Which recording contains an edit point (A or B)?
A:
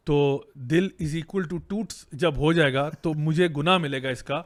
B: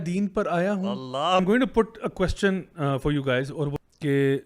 B